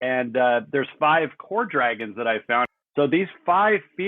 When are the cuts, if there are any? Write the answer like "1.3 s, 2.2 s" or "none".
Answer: 2.7 s